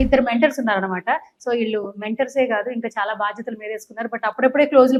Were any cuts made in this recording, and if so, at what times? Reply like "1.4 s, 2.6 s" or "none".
none